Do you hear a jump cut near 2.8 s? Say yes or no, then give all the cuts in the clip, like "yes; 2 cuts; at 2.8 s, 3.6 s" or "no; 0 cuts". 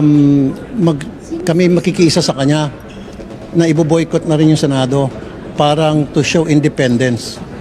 yes; 1 cut; at 2.8 s